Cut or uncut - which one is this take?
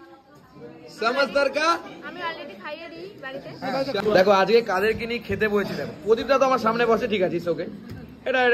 cut